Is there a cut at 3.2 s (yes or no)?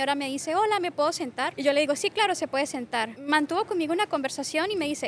yes